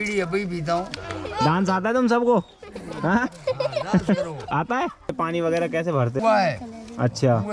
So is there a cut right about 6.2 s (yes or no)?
yes